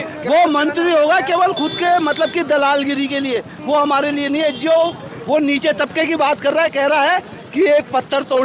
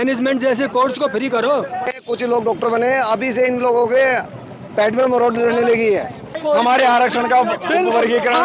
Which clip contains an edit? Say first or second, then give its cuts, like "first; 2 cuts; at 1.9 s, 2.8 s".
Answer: second; 2 cuts; at 2.0 s, 6.4 s